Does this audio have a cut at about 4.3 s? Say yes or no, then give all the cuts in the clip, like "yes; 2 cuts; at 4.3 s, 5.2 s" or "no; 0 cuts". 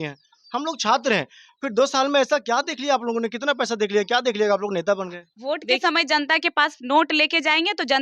no; 1 cut; at 5.8 s